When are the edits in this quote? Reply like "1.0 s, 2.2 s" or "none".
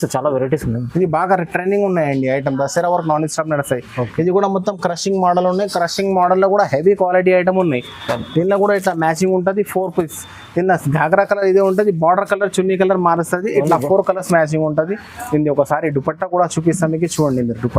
none